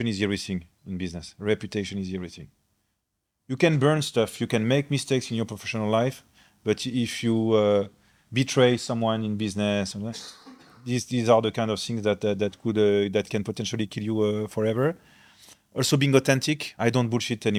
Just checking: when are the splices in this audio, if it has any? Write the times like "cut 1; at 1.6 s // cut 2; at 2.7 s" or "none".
none